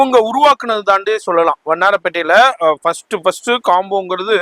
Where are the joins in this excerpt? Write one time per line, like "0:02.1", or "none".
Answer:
none